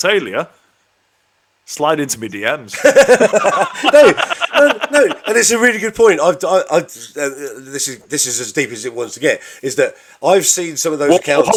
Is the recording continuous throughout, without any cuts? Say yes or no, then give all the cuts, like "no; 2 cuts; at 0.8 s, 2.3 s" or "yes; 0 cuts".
yes; 0 cuts